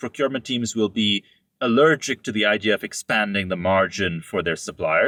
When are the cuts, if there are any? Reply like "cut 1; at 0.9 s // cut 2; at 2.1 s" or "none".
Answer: none